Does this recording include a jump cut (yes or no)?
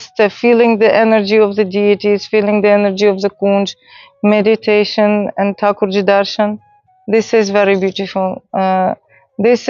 no